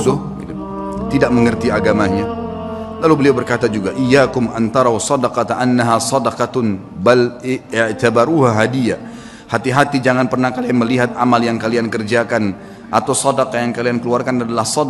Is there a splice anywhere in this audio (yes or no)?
no